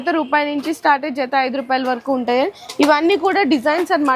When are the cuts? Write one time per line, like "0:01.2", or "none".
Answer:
none